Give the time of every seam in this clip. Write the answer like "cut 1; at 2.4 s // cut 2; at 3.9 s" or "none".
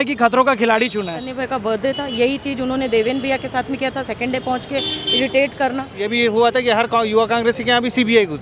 cut 1; at 1.3 s // cut 2; at 6.0 s